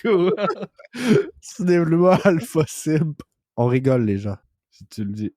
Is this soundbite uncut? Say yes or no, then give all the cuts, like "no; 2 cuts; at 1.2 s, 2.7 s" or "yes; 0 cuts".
no; 2 cuts; at 3.4 s, 4.4 s